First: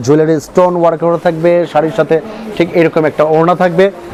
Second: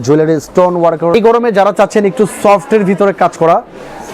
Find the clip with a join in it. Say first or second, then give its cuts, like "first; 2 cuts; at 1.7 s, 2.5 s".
second; 1 cut; at 1.1 s